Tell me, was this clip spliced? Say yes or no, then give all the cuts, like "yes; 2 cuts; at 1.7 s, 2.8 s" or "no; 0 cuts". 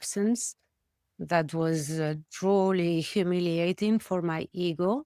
no; 0 cuts